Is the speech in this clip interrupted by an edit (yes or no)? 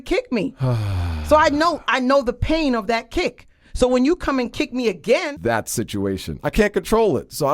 yes